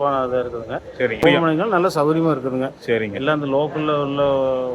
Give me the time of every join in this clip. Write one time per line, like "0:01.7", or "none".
0:01.2